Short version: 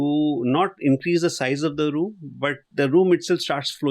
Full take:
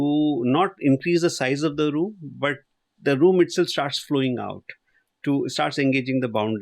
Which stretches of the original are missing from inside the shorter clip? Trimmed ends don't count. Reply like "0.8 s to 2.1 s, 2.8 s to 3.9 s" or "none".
2.6 s to 2.9 s